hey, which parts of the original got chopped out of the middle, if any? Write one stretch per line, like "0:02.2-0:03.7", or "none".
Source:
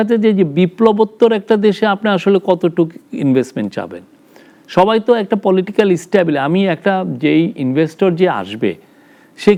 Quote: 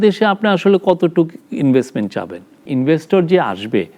0:04.3-0:07.5